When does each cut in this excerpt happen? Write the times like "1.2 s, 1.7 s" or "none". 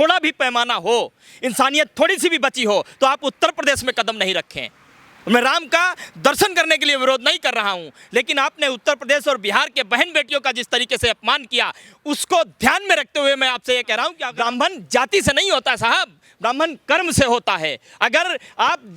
14.2 s